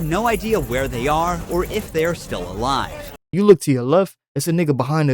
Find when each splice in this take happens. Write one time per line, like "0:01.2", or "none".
0:03.3